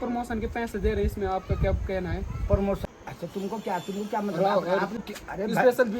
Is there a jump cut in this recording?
yes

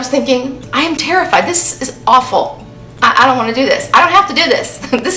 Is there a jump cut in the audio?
no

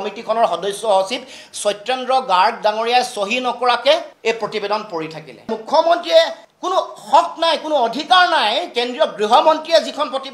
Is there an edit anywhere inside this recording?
yes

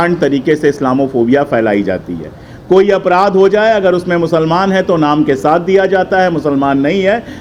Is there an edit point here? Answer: no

